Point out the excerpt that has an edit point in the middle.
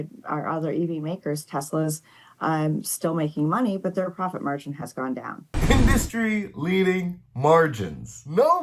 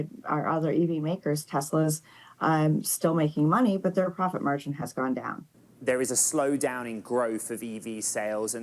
second; 1 cut; at 5.4 s

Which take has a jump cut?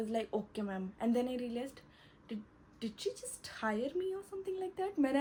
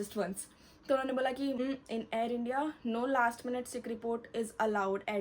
second; 1 cut; at 1.6 s

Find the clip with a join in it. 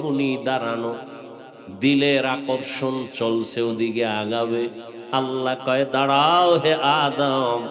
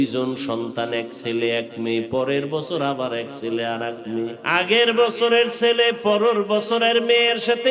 second; 1 cut; at 4.4 s

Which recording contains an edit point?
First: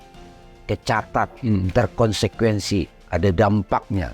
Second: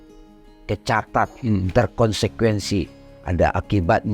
first; 1 cut; at 3.0 s

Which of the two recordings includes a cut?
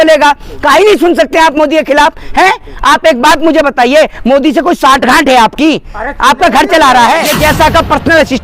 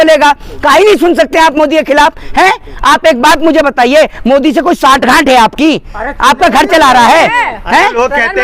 first; 1 cut; at 7.3 s

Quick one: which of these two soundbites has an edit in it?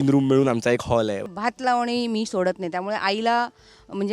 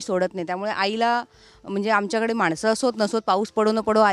first; 1 cut; at 1.3 s

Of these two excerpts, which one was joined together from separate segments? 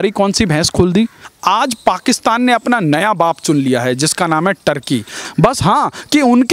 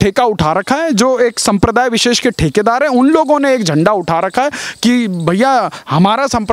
first; 2 cuts; at 1.2 s, 5.2 s

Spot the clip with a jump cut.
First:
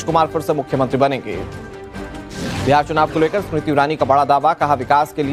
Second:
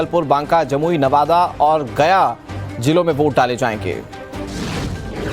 second; 1 cut; at 1.3 s

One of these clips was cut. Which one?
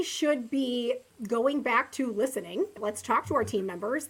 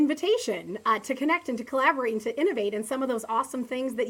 first; 2 cuts; at 1.1 s, 2.8 s

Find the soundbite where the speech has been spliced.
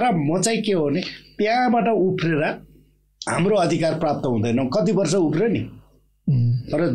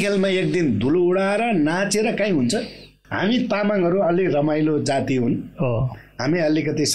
second; 1 cut; at 3.0 s

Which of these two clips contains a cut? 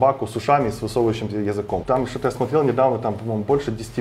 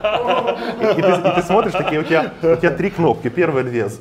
first; 1 cut; at 1.8 s

